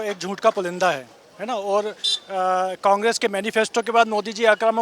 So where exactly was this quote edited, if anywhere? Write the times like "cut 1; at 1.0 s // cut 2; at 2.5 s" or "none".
none